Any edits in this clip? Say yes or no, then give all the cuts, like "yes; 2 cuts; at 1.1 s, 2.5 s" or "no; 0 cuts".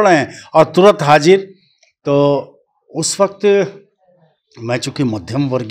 no; 0 cuts